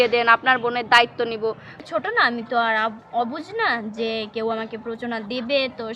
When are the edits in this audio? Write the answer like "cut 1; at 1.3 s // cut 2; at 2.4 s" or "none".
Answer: cut 1; at 1.8 s